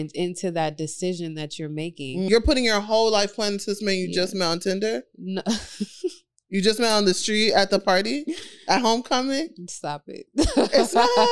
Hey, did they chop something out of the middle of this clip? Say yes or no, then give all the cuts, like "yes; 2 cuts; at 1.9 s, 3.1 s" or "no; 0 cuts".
yes; 1 cut; at 2.3 s